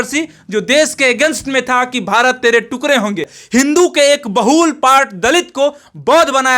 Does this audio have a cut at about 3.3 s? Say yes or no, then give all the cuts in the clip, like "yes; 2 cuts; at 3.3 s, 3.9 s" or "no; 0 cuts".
yes; 1 cut; at 3.3 s